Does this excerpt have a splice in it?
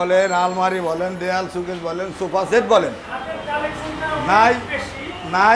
no; 0 cuts

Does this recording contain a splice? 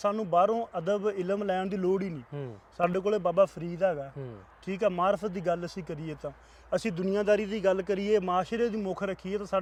no; 0 cuts

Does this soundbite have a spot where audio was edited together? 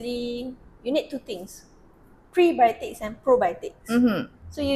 no; 0 cuts

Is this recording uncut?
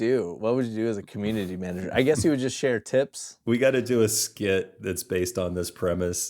no; 1 cut; at 3.3 s

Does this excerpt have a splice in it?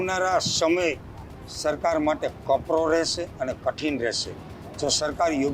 no; 0 cuts

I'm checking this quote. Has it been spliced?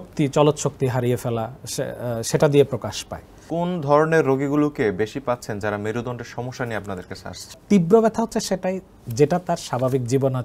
yes; 2 cuts; at 3.4 s, 7.6 s

